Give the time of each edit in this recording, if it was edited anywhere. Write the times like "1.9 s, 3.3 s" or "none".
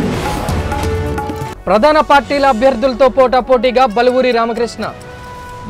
1.5 s